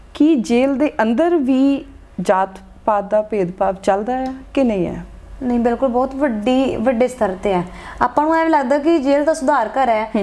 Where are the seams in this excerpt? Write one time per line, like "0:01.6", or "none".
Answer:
none